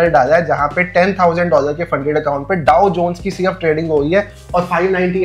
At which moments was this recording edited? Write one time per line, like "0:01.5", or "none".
none